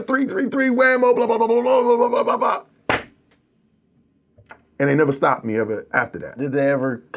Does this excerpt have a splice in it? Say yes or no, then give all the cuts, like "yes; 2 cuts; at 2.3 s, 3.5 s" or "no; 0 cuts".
no; 0 cuts